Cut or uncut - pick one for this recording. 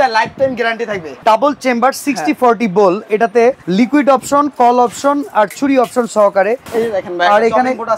cut